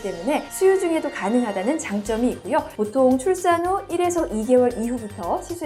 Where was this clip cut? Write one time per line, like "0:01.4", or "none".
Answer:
none